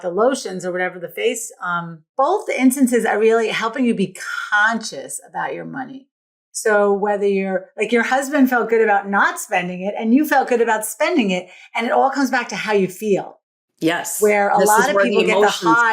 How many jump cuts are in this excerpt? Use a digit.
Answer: 1